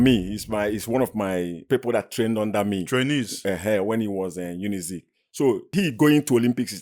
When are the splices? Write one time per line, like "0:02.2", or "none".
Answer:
0:01.6
0:05.7

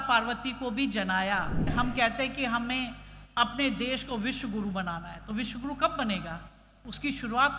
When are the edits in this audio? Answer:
0:01.7

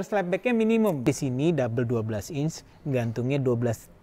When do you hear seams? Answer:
0:01.1

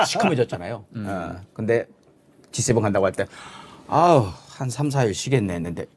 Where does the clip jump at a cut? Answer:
none

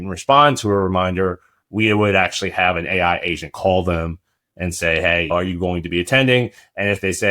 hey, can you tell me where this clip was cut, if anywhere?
0:05.3

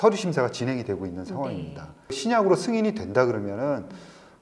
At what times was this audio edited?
0:02.2

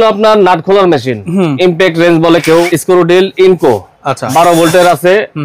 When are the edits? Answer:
0:02.7

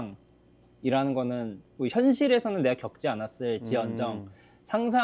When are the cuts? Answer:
0:01.6

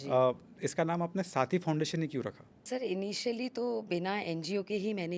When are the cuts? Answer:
0:02.6

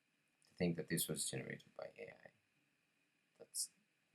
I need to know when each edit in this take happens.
none

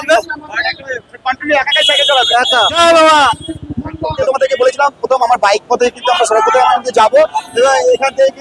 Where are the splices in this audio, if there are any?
none

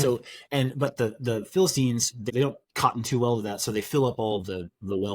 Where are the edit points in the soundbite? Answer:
0:02.3

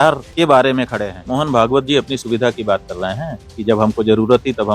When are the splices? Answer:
none

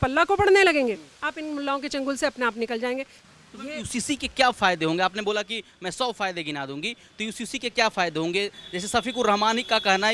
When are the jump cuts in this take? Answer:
0:03.1

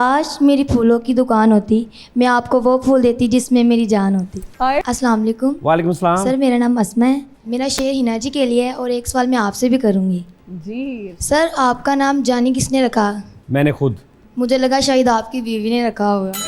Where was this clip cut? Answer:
0:04.8

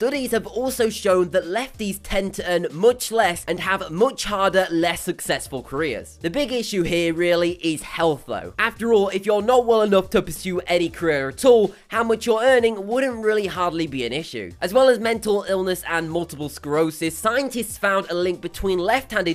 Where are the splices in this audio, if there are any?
none

